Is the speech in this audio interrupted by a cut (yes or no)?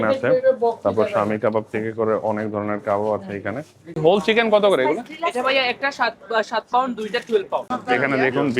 yes